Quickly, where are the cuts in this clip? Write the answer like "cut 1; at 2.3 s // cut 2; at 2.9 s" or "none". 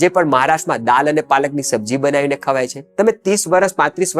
cut 1; at 2.8 s